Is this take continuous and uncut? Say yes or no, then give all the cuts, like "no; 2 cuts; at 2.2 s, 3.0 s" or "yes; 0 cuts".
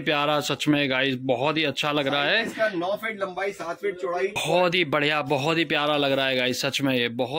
no; 1 cut; at 4.4 s